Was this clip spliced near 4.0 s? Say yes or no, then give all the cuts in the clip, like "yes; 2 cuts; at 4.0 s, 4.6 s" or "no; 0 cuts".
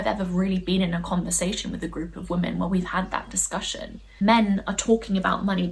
yes; 1 cut; at 4.0 s